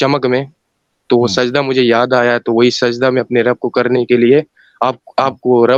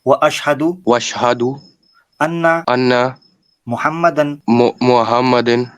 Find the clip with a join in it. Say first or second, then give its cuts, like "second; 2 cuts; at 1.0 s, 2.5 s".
second; 3 cuts; at 0.8 s, 2.6 s, 4.4 s